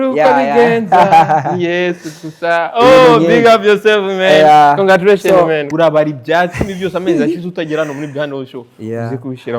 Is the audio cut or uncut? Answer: cut